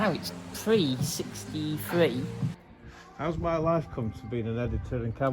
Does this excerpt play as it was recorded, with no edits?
no; 1 cut; at 2.6 s

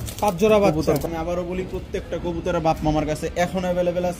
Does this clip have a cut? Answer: yes; 1 cut; at 1.0 s

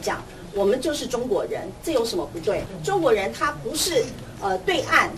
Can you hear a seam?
yes; 1 cut; at 2.7 s

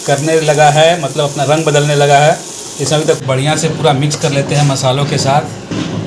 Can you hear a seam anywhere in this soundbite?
yes; 1 cut; at 3.2 s

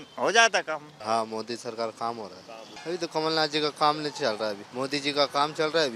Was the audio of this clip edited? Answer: yes; 3 cuts; at 0.9 s, 2.7 s, 4.6 s

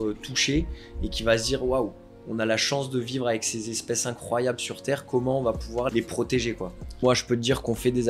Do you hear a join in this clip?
yes; 2 cuts; at 5.9 s, 7.0 s

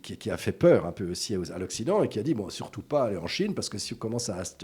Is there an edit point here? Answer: no; 0 cuts

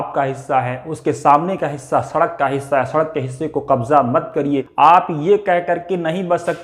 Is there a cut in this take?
yes; 1 cut; at 4.7 s

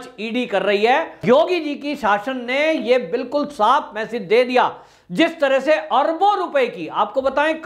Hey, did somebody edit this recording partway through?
yes; 1 cut; at 1.2 s

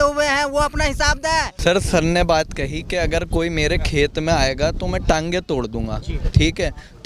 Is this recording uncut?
no; 1 cut; at 1.5 s

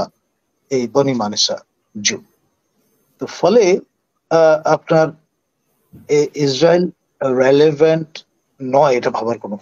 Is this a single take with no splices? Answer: yes; 0 cuts

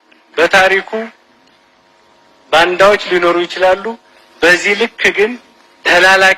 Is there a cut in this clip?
no; 0 cuts

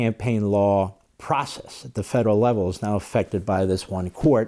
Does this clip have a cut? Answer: yes; 1 cut; at 1.1 s

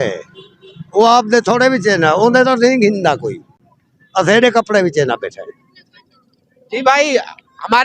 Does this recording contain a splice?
no; 0 cuts

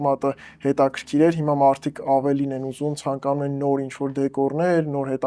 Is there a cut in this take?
no; 0 cuts

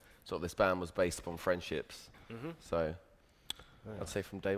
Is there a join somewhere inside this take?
yes; 1 cut; at 0.9 s

